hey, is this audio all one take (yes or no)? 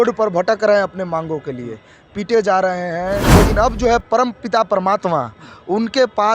no